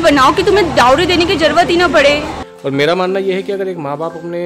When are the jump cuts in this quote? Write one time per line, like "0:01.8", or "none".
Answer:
0:02.3